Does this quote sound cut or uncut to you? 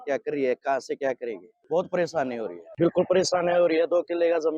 cut